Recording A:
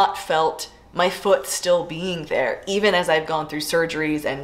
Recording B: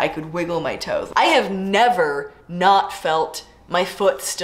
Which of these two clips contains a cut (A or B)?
B